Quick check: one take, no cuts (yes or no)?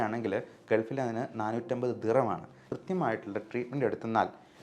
no